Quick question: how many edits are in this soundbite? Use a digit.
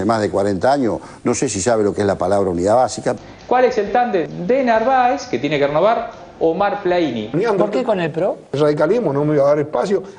2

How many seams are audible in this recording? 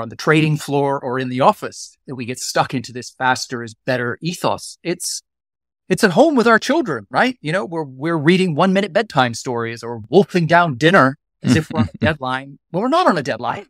2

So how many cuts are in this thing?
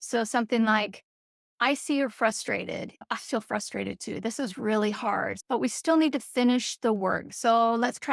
2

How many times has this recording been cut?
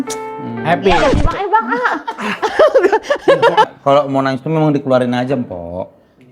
1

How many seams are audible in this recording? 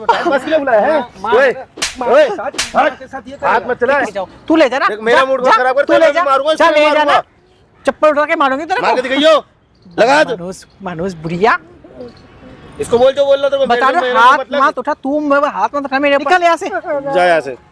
2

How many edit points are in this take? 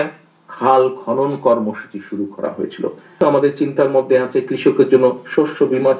1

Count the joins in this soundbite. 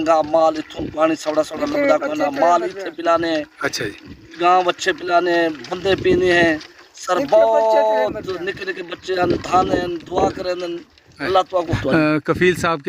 1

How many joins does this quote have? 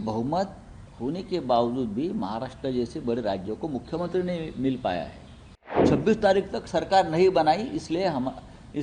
1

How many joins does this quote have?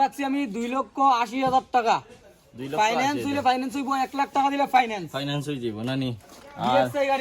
0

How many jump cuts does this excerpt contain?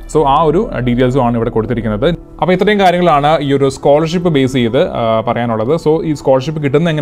0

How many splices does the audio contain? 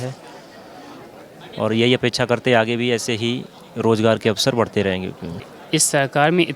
1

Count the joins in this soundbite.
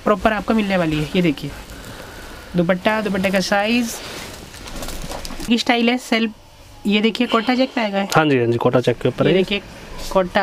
1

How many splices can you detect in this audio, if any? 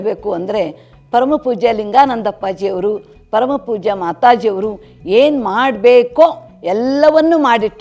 0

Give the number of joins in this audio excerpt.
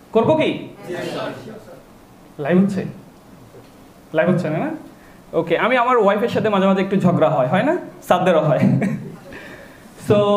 0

